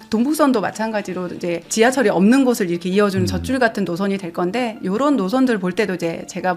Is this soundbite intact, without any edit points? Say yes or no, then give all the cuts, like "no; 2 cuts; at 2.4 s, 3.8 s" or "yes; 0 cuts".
yes; 0 cuts